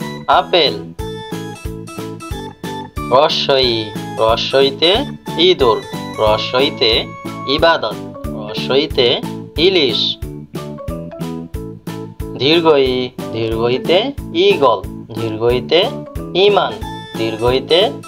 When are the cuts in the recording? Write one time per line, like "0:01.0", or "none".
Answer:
0:01.0
0:03.1
0:10.0
0:12.4